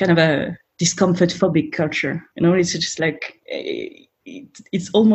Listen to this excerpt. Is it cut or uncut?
cut